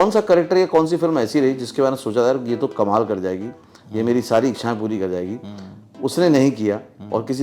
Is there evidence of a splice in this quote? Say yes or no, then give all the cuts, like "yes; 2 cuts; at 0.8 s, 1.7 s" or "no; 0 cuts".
no; 0 cuts